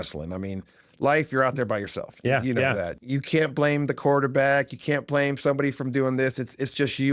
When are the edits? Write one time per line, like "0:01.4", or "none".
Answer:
0:03.0